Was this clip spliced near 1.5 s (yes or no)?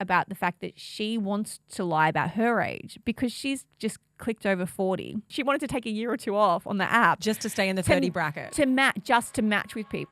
no